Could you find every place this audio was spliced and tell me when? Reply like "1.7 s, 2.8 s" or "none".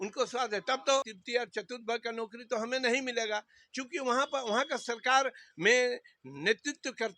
1.2 s